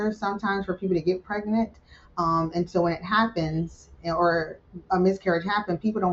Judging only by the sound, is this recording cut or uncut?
uncut